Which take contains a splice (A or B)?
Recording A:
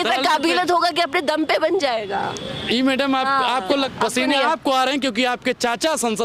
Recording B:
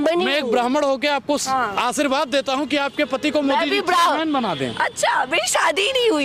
A